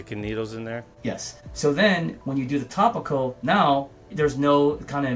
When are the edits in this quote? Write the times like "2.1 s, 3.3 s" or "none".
1.1 s